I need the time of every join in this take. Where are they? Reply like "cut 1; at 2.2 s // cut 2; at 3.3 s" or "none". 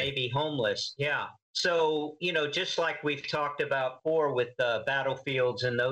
cut 1; at 1.4 s

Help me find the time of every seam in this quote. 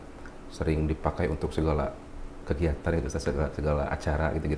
none

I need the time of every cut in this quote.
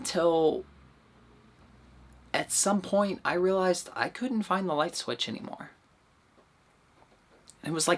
none

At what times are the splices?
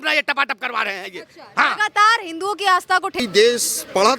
cut 1; at 3.2 s

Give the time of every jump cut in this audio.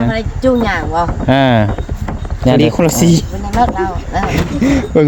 cut 1; at 2.6 s

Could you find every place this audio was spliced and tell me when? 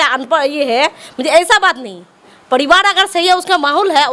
none

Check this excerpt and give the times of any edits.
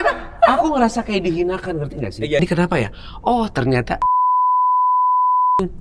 cut 1; at 2.4 s

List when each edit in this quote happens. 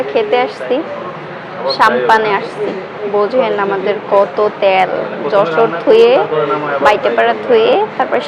none

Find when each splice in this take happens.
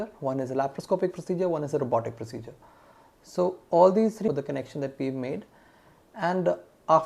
cut 1; at 4.3 s

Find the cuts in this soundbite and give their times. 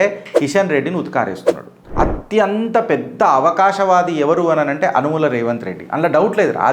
cut 1; at 1.8 s

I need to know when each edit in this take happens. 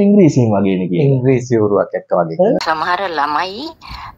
cut 1; at 2.6 s

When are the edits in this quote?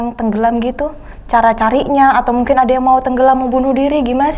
none

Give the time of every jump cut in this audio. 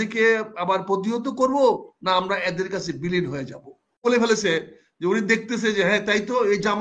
cut 1; at 4.0 s

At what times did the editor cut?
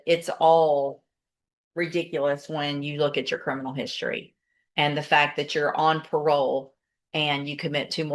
none

